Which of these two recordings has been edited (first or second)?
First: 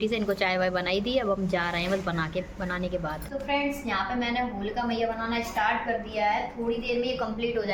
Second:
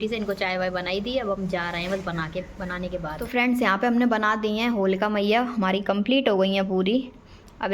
second